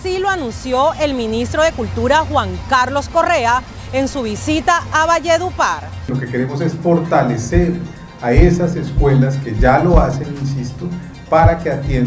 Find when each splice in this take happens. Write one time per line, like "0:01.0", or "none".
0:06.0